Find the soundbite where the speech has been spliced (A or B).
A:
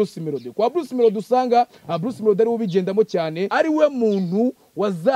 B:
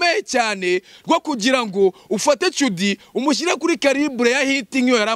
A